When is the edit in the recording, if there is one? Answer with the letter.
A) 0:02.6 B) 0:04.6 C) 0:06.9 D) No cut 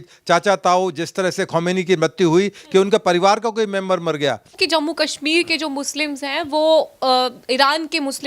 B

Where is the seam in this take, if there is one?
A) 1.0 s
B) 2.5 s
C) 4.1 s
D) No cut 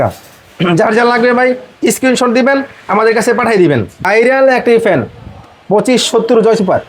C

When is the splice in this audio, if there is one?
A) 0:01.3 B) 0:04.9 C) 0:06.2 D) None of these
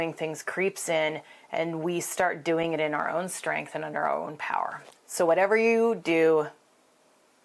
D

